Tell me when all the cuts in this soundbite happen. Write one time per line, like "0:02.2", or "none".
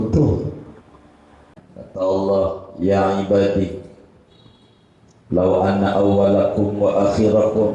0:01.5